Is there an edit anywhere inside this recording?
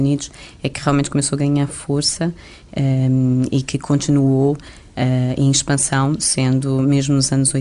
no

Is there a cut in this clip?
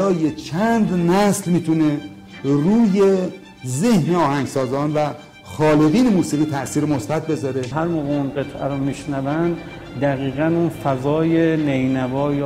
yes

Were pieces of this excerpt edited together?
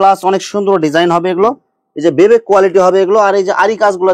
no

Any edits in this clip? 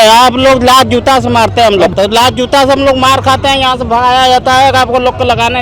yes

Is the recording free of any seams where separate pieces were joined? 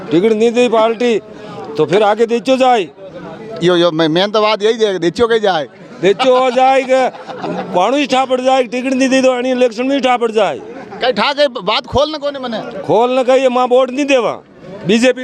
yes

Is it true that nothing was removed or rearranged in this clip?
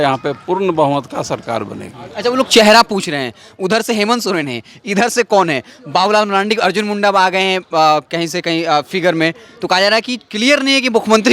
yes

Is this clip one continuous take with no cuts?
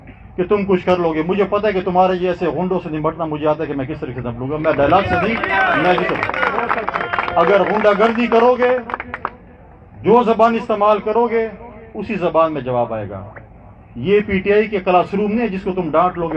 yes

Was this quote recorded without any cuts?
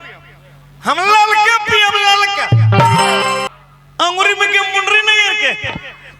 no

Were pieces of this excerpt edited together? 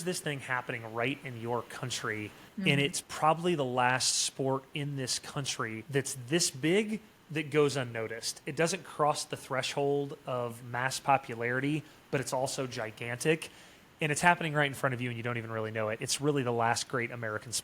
yes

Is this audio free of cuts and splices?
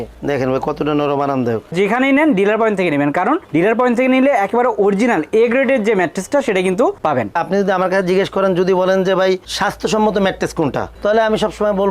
no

